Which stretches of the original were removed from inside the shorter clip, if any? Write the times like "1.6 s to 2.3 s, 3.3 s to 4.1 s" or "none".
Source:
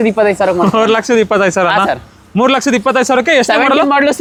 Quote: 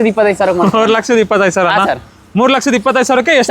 none